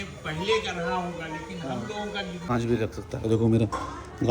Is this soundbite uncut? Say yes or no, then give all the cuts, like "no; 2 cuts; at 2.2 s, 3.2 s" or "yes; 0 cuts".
no; 1 cut; at 2.5 s